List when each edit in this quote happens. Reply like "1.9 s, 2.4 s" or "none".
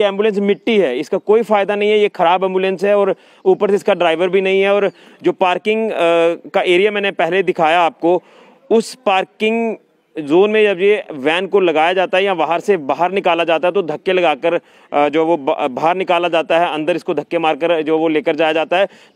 none